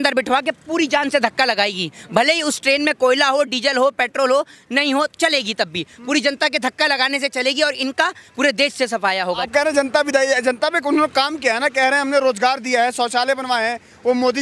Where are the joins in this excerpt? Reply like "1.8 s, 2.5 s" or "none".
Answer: none